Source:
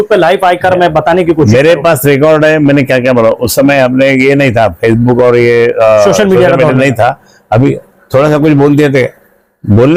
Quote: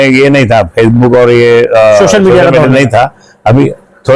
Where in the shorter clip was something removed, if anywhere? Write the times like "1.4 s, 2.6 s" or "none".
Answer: none

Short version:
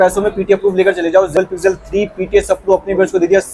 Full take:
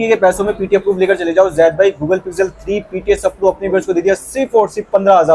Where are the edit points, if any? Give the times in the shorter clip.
1.3 s

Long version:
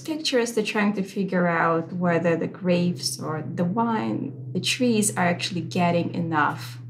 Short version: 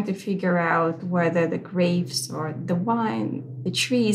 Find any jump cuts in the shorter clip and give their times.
none

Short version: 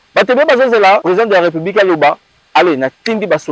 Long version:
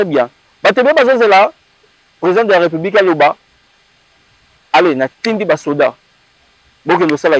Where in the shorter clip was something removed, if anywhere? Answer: 1.0 s, 2.3 s

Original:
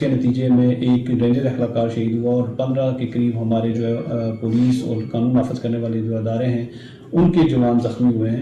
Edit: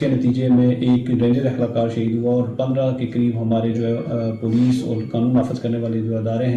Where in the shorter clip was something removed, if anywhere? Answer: none

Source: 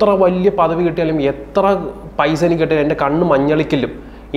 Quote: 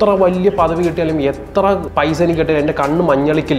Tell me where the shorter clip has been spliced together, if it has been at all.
1.9 s

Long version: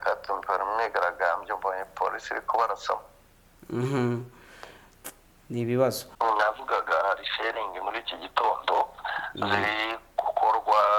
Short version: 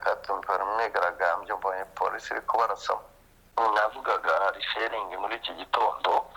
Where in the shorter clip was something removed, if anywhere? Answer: 3.4 s

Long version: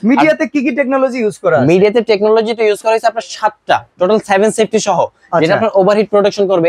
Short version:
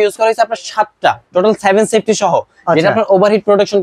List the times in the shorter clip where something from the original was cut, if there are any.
none

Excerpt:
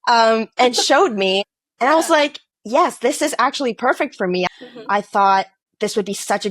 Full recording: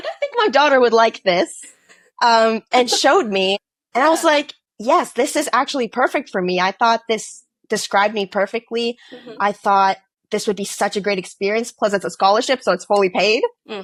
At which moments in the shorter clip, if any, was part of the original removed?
4.5 s

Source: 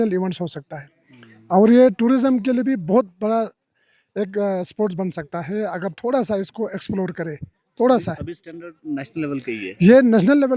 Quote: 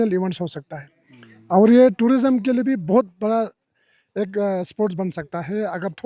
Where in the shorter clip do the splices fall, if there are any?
none

